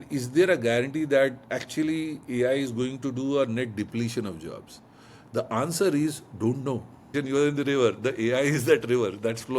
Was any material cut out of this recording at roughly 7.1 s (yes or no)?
yes